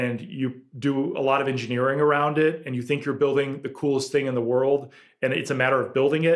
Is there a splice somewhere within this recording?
no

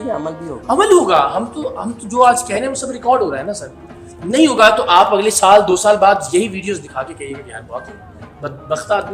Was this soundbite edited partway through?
no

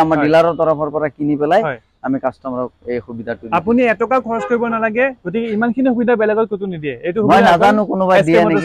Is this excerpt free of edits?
yes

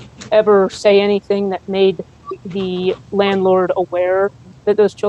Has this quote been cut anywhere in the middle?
no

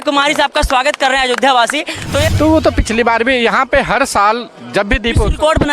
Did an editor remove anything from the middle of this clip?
yes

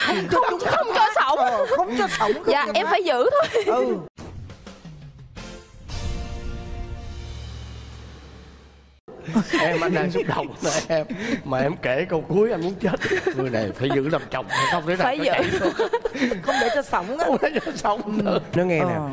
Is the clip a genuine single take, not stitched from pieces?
yes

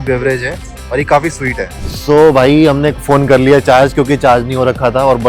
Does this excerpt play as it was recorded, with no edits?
no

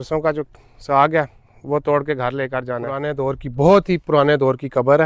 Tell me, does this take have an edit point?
yes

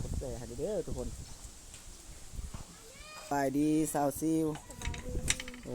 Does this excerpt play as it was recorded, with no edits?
no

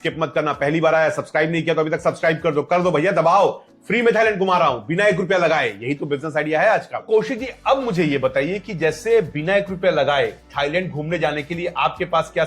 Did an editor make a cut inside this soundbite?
yes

